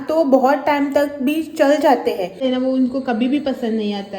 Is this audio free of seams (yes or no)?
no